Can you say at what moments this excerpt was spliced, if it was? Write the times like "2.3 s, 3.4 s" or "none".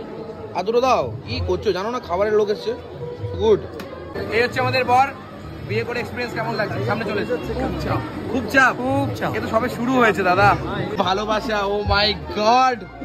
4.0 s, 10.9 s